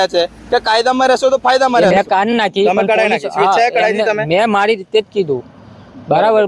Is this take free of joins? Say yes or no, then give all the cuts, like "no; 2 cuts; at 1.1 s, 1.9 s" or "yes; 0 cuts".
no; 1 cut; at 2.3 s